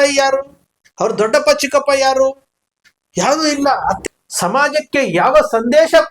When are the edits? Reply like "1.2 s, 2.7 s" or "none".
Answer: 4.0 s